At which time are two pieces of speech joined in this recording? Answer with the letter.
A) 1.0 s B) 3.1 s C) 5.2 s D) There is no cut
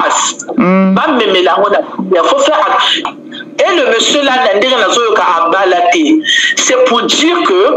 B